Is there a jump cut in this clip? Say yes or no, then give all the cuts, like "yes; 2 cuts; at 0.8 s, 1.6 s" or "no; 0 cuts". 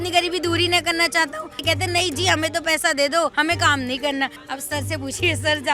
yes; 3 cuts; at 1.6 s, 3.3 s, 4.4 s